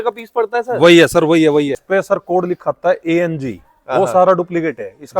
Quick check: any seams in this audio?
yes; 1 cut; at 1.8 s

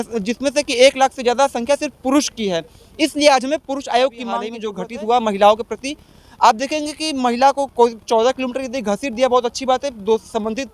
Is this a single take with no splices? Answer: no; 1 cut; at 4.5 s

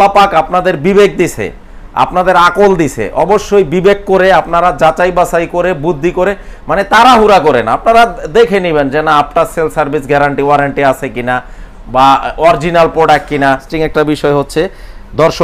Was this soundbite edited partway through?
yes; 1 cut; at 13.7 s

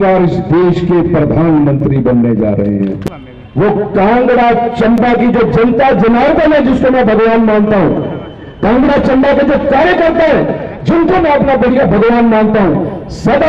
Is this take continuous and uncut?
no; 1 cut; at 3.0 s

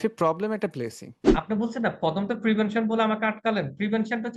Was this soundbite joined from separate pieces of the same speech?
yes; 1 cut; at 1.2 s

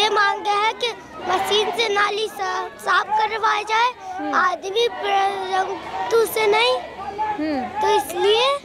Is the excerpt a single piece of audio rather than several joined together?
yes; 0 cuts

